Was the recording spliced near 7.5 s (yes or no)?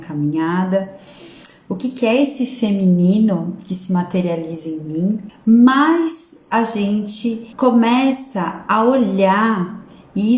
yes